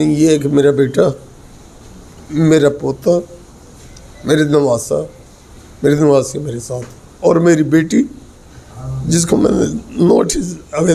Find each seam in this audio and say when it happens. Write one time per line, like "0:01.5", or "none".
none